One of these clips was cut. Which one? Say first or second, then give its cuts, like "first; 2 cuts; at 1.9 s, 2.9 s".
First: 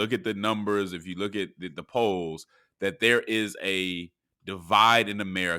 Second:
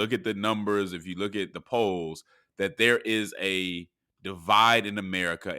second; 1 cut; at 1.6 s